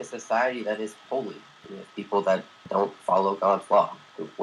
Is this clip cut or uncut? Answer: cut